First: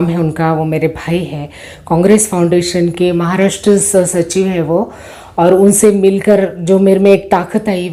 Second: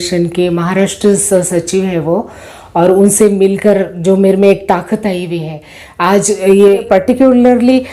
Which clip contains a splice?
second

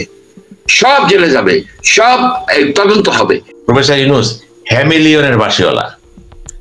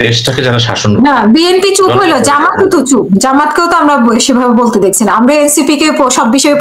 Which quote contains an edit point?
first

